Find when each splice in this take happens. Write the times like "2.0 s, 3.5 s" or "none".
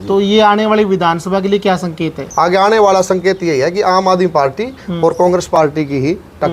2.2 s